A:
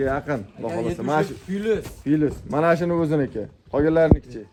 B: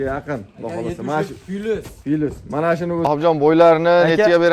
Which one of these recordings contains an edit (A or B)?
B